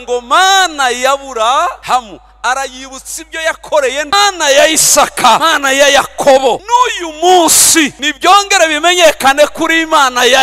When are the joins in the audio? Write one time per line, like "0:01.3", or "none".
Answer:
0:01.8
0:04.1
0:05.5
0:06.6
0:08.0

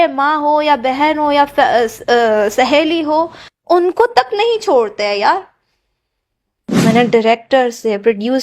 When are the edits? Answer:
0:06.8

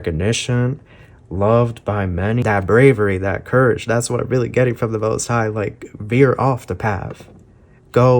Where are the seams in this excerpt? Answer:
0:02.4

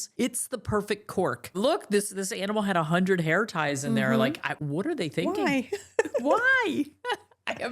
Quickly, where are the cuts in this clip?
0:01.6

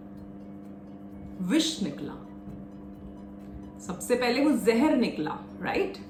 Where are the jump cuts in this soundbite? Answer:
none

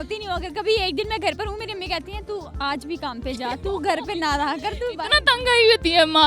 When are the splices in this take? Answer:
none

